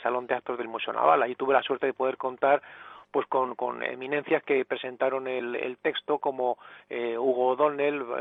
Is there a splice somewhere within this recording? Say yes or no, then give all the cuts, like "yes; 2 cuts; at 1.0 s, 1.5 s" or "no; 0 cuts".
no; 0 cuts